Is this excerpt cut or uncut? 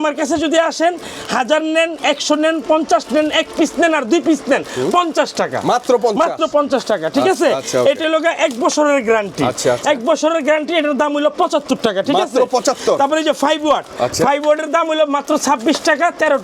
uncut